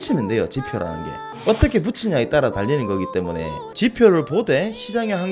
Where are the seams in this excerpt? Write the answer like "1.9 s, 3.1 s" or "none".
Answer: 3.6 s